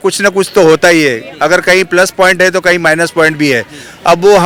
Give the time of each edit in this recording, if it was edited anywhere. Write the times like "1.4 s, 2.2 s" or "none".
none